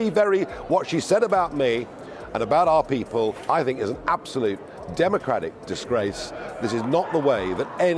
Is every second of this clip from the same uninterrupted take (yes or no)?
no